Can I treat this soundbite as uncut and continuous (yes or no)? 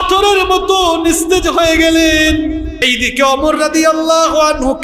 no